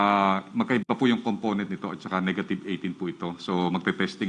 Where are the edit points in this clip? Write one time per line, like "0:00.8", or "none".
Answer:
none